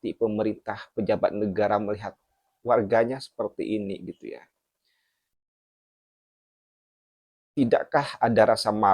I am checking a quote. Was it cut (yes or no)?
no